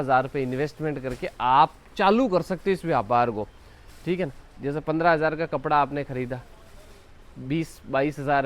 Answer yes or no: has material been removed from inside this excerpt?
no